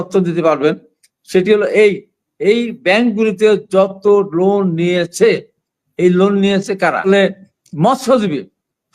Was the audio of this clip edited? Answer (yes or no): yes